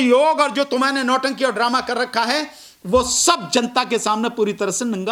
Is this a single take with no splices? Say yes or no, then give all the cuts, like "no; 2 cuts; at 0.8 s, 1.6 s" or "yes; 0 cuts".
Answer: yes; 0 cuts